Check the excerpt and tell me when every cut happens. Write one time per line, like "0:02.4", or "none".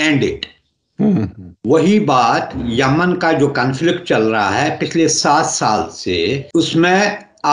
0:06.4